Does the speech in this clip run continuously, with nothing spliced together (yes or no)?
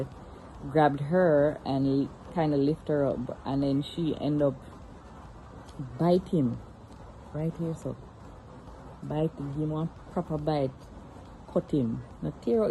yes